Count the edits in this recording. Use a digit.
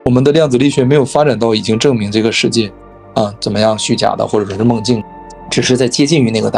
2